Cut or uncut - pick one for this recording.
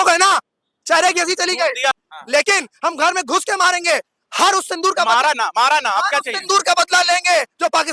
cut